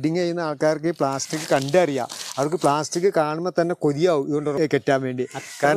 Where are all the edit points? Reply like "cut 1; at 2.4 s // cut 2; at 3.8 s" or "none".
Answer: cut 1; at 4.5 s